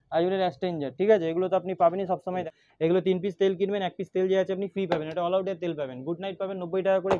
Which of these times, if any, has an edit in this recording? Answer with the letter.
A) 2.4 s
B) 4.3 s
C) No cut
A